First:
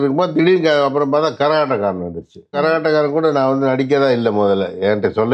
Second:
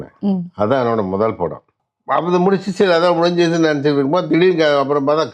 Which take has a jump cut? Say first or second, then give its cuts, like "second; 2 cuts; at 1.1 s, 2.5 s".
first; 1 cut; at 2.6 s